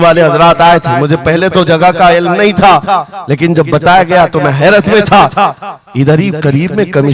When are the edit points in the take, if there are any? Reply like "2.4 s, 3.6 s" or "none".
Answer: none